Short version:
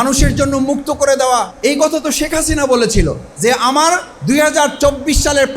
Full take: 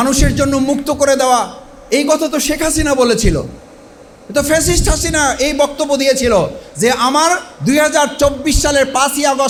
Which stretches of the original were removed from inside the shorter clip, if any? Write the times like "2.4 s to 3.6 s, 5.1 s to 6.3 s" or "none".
1.5 s to 1.8 s, 3.5 s to 6.6 s

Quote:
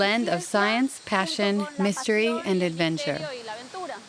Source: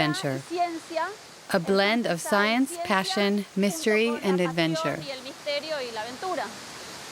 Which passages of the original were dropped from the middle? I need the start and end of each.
4.9 s to 5.6 s

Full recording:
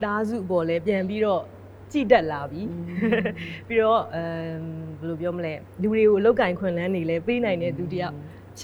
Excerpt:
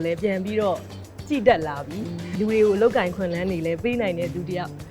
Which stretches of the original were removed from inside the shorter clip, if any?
2.9 s to 5.6 s

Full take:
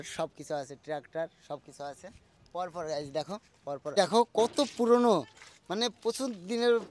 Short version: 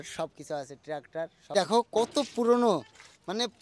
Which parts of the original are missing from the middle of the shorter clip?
1.5 s to 3.9 s

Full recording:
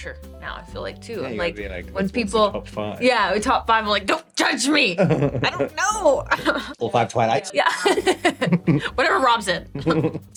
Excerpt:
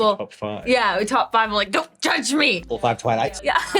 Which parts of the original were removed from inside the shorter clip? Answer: 4.9 s to 6.7 s

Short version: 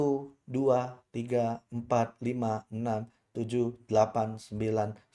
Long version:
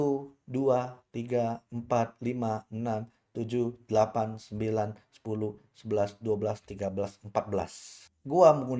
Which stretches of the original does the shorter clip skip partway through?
none

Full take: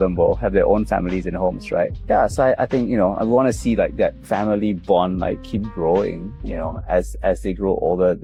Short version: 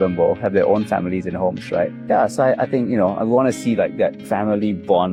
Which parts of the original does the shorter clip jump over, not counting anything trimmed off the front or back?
none

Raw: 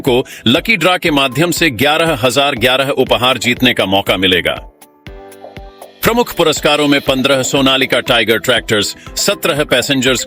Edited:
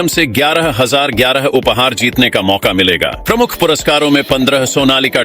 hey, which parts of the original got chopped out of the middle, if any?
4.6 s to 5.9 s

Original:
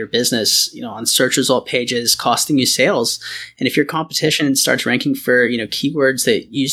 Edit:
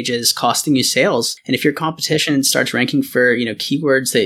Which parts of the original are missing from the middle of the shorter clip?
3.2 s to 3.5 s

